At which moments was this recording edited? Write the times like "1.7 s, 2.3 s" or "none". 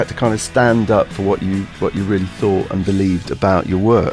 none